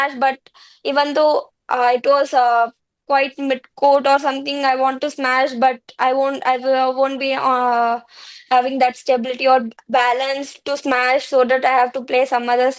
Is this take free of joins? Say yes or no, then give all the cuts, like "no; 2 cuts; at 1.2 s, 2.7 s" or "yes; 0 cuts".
yes; 0 cuts